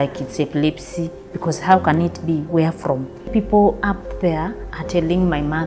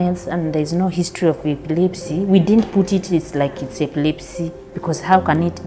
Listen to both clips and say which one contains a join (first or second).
first